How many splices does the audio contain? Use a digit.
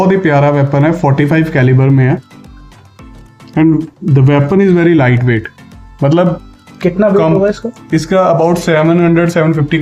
0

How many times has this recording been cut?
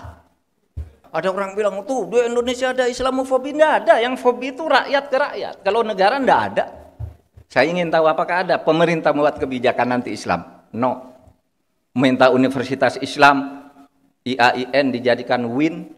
1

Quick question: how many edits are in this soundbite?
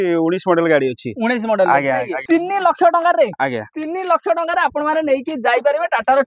1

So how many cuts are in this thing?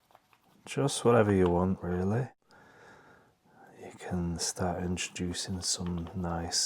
1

